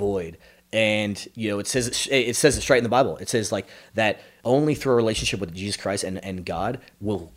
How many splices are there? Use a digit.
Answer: 1